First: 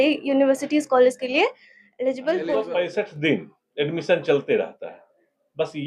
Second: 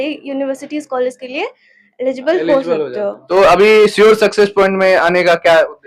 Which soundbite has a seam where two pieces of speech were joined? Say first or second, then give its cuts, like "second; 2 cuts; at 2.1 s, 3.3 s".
first; 1 cut; at 2.5 s